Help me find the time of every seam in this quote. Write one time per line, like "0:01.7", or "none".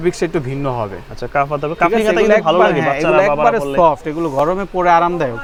none